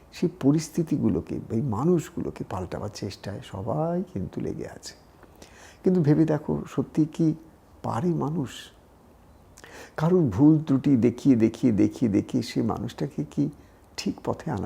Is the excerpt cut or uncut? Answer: uncut